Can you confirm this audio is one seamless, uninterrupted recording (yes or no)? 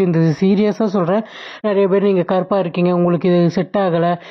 yes